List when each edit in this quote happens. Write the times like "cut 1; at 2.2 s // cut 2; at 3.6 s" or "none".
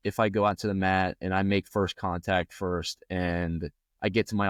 none